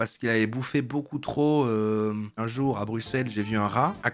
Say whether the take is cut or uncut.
cut